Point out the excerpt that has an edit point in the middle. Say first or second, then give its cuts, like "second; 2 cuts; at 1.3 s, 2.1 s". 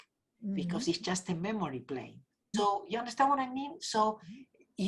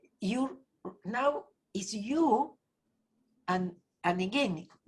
first; 1 cut; at 2.5 s